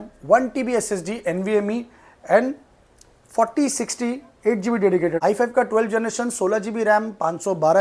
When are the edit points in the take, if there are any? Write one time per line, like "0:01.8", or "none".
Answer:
0:05.2